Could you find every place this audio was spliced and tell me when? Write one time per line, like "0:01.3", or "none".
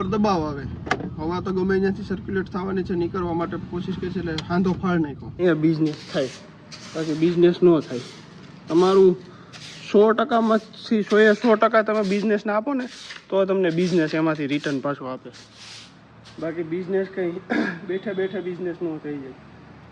0:05.4